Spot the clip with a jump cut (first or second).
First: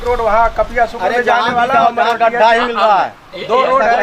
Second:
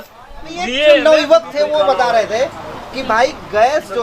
second